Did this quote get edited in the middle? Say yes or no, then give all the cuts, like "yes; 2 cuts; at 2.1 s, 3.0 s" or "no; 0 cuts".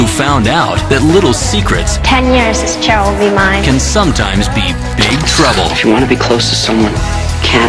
yes; 1 cut; at 2.2 s